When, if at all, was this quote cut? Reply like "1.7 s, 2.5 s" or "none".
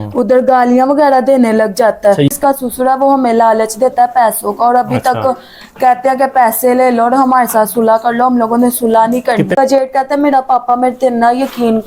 2.3 s, 9.5 s